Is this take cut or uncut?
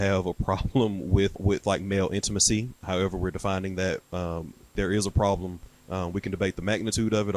cut